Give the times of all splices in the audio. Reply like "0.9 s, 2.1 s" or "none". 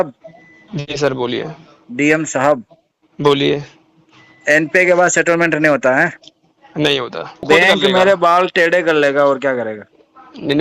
7.5 s

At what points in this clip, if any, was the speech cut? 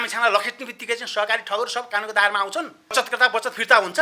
2.9 s

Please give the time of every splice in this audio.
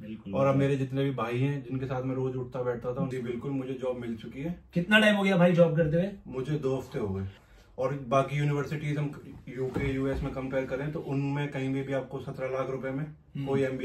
3.0 s, 7.4 s

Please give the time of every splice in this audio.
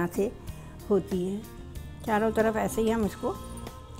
1.9 s

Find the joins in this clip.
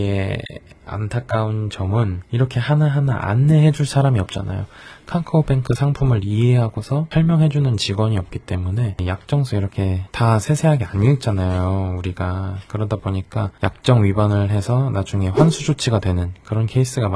2.2 s, 9.0 s

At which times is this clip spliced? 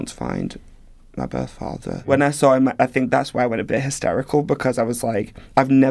2.1 s

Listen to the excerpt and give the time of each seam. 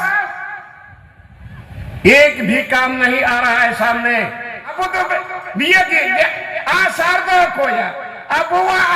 4.7 s

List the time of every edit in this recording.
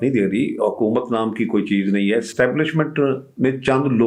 none

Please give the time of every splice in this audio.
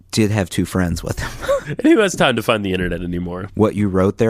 1.7 s, 3.4 s

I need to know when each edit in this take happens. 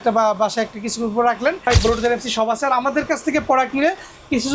1.6 s

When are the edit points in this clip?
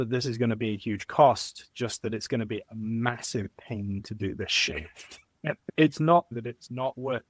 5.7 s, 6.3 s

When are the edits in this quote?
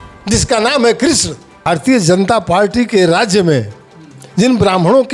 1.6 s

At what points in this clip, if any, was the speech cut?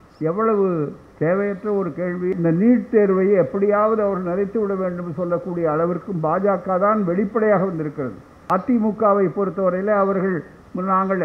2.3 s, 8.4 s

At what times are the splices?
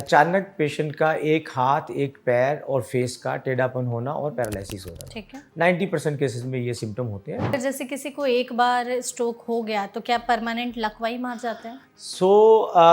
7.5 s

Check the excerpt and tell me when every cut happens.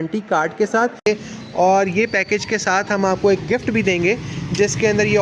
1.1 s

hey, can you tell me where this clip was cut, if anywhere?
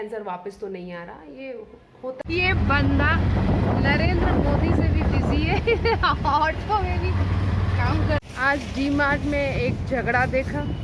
2.2 s, 8.2 s

